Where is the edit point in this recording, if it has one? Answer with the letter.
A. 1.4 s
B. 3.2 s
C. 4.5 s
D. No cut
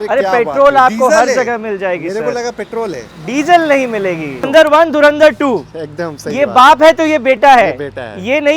C